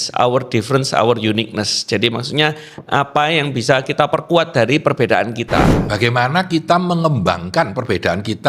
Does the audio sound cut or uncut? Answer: uncut